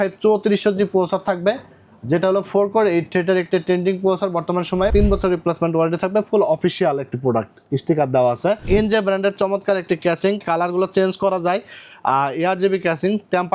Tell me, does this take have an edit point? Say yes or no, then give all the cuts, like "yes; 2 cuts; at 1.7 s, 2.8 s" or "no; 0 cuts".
yes; 2 cuts; at 4.9 s, 8.6 s